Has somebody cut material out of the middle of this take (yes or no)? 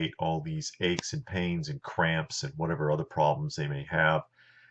no